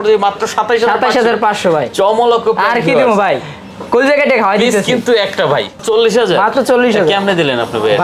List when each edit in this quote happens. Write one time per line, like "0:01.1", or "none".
0:05.8

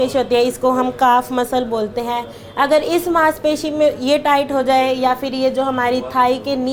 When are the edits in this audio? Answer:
none

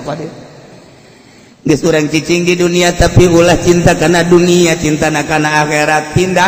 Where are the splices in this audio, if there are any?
none

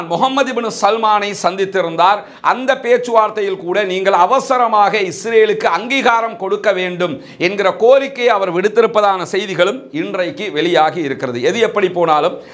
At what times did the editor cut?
none

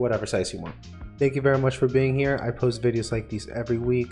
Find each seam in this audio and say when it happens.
0:01.0

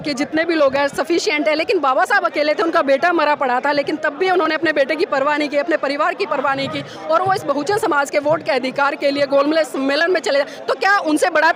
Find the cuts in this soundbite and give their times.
none

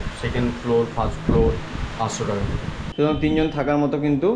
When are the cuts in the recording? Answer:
0:02.8

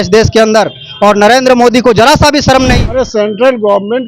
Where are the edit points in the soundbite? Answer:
0:02.8

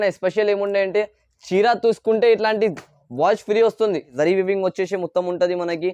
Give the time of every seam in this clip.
0:04.1

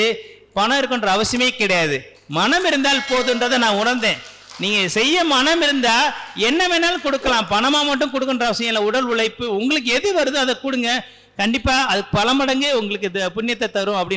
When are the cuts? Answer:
none

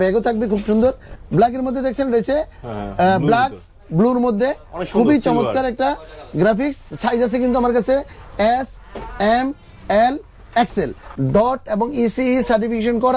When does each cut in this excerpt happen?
0:01.1
0:06.9
0:11.1

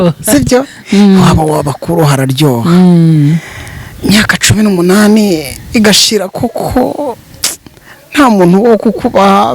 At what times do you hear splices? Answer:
none

